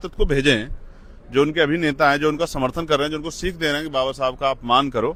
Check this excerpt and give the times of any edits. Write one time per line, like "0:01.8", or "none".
none